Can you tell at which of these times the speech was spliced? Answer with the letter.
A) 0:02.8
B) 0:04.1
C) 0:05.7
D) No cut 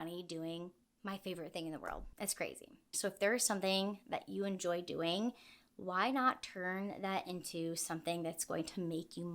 A